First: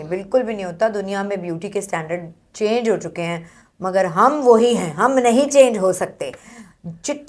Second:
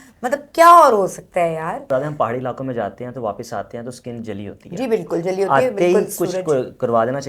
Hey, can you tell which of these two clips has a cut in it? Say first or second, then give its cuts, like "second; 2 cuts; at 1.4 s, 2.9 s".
second; 1 cut; at 1.8 s